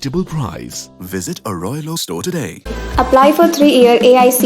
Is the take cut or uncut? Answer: uncut